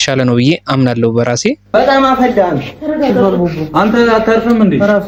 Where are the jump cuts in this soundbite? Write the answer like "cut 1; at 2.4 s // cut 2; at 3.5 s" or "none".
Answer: none